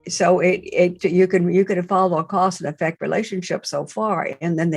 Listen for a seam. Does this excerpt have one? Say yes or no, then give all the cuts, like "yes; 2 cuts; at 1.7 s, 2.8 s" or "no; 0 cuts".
yes; 1 cut; at 1.0 s